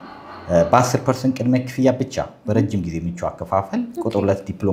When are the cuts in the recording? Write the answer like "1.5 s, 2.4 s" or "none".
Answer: none